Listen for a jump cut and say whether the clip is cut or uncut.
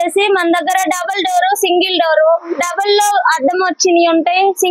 uncut